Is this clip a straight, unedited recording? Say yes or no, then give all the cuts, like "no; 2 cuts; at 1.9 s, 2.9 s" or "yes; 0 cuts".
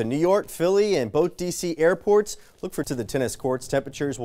no; 1 cut; at 2.9 s